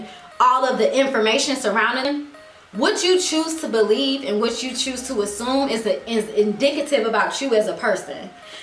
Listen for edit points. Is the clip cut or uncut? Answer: cut